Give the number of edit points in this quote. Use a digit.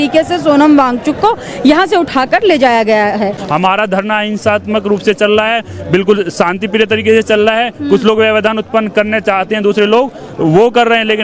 1